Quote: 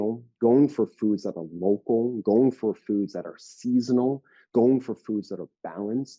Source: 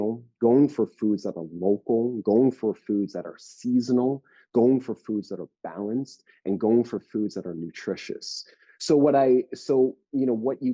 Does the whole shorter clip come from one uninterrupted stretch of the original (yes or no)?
yes